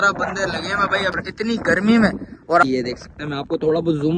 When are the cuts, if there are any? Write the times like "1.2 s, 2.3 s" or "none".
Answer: 1.1 s, 2.6 s